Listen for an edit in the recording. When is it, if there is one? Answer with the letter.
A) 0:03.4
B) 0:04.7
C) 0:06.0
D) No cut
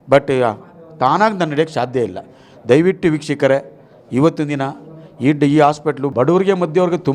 C